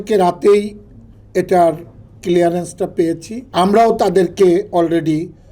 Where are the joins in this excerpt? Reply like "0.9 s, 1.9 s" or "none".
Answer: 3.4 s